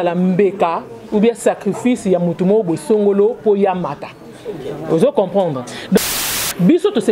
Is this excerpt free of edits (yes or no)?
no